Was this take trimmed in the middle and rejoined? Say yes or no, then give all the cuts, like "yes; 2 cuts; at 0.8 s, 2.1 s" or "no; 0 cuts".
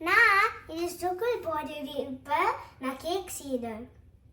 no; 0 cuts